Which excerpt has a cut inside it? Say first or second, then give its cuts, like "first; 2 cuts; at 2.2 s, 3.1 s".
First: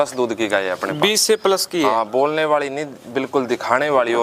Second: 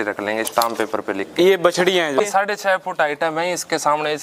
second; 1 cut; at 2.2 s